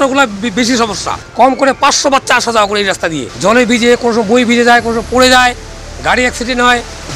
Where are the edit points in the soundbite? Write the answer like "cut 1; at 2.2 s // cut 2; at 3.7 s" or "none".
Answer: cut 1; at 1.2 s // cut 2; at 3.3 s

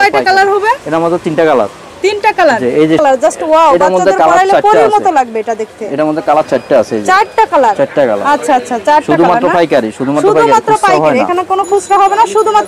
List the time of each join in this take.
cut 1; at 3.0 s

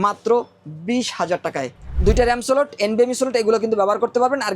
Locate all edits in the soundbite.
cut 1; at 2.0 s

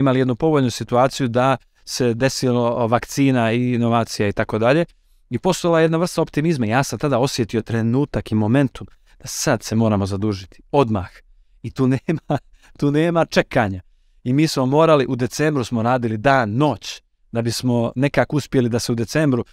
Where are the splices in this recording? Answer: none

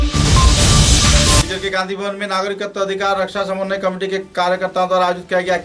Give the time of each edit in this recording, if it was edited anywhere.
cut 1; at 1.4 s

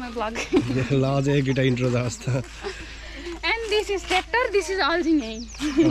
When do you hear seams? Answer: none

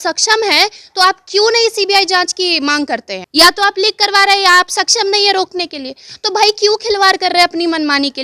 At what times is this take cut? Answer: cut 1; at 3.2 s

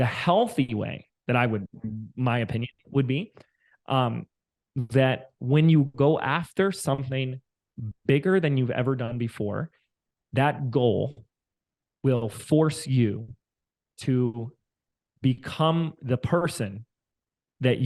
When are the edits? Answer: none

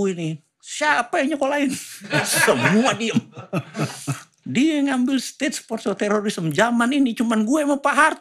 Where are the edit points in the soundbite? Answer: none

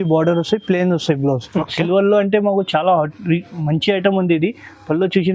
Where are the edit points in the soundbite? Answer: cut 1; at 1.7 s

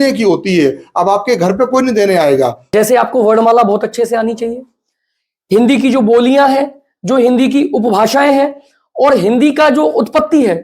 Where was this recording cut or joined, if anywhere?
cut 1; at 2.6 s

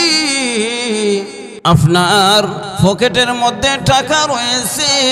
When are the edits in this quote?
cut 1; at 1.4 s // cut 2; at 2.6 s

